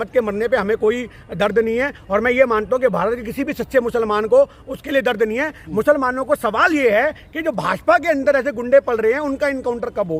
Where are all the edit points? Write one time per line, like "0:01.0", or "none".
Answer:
none